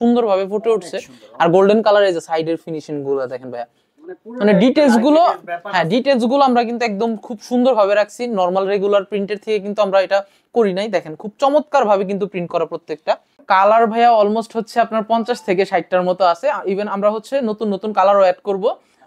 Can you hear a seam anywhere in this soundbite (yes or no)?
yes